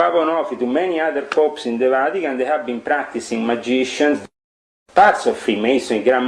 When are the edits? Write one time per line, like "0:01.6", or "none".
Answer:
0:04.2